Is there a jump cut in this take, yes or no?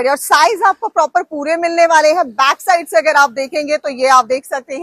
no